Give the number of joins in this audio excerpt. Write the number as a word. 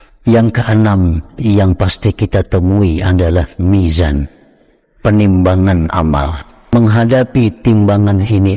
one